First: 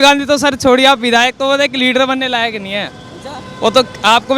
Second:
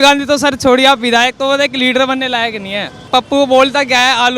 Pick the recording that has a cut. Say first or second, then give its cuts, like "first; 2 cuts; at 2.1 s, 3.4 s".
second; 1 cut; at 3.1 s